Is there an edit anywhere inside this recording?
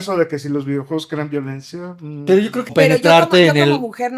yes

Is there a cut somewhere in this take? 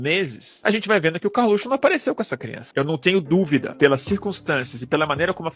yes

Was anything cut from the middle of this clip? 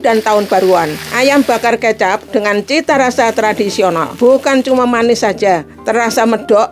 yes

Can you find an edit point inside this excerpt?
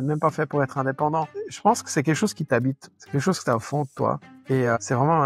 yes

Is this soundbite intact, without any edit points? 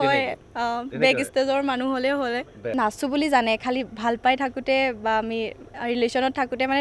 no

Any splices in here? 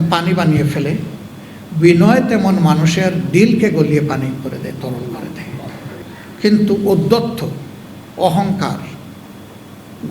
yes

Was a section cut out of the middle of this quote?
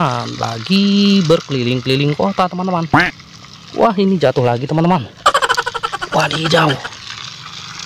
no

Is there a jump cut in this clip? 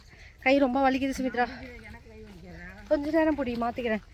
no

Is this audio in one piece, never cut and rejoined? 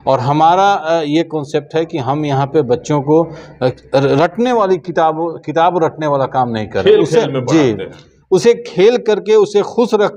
yes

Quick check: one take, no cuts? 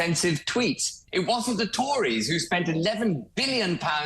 no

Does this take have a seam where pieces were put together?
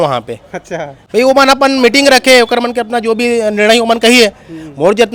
no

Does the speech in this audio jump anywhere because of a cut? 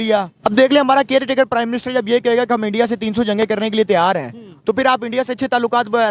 no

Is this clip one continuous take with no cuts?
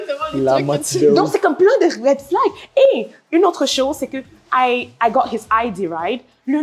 yes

